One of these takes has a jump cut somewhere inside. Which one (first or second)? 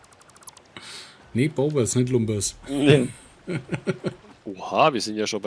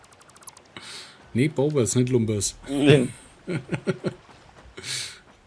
first